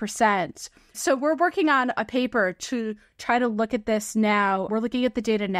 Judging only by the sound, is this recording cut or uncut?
uncut